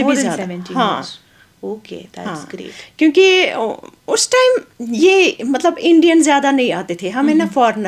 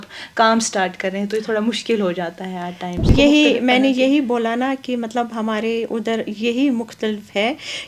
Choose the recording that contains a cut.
second; 1 cut; at 3.1 s

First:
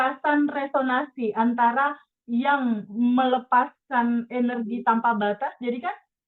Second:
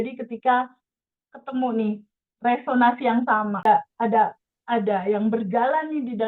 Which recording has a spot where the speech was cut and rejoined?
second; 1 cut; at 3.7 s

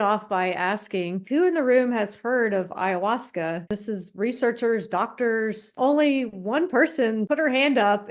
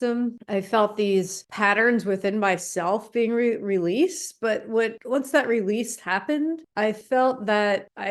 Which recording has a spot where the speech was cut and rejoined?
first; 4 cuts; at 1.2 s, 3.7 s, 5.7 s, 7.2 s

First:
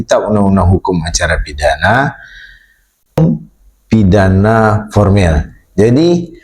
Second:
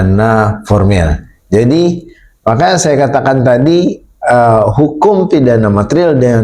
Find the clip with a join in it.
first; 1 cut; at 3.2 s

